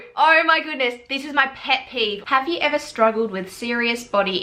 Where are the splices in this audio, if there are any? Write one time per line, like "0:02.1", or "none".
0:02.2